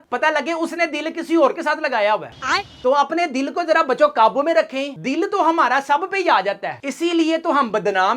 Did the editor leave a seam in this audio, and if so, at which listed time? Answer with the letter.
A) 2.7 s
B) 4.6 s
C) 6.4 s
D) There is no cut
D